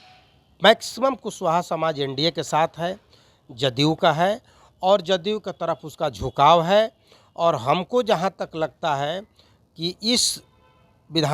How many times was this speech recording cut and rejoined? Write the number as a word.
zero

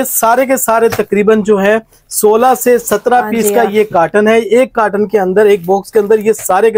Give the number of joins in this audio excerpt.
zero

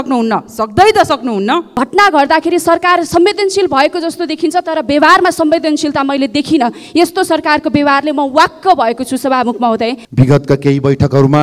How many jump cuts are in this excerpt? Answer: two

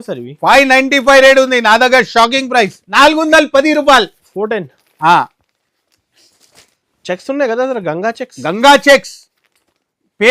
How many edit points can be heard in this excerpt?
one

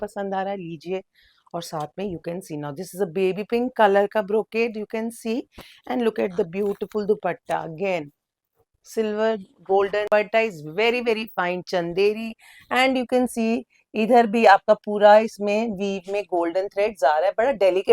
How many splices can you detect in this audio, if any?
one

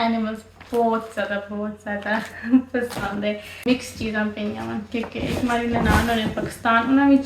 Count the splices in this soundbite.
one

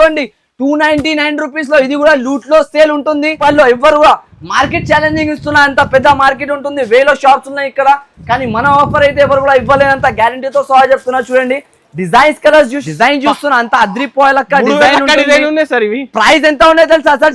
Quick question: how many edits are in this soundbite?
two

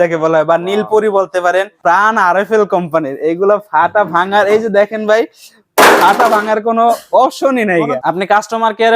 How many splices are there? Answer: two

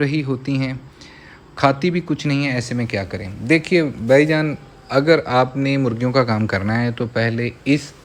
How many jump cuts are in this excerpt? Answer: zero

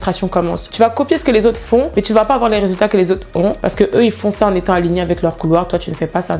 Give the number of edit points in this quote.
zero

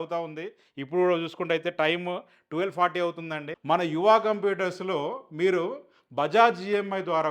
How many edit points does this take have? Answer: one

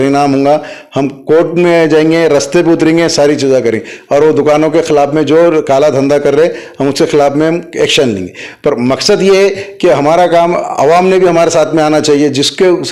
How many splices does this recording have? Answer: zero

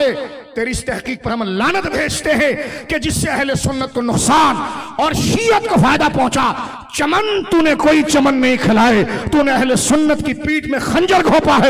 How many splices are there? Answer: zero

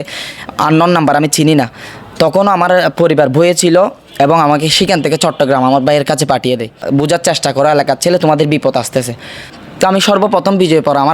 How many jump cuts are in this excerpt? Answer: two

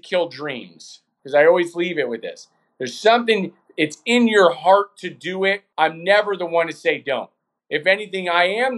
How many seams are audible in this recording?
two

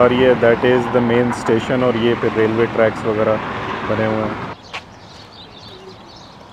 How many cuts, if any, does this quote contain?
one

